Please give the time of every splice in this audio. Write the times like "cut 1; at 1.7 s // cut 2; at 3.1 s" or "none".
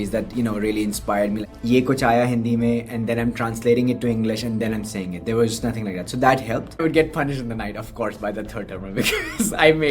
cut 1; at 1.4 s // cut 2; at 6.8 s